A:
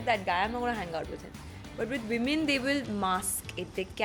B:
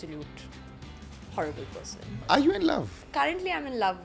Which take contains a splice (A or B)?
B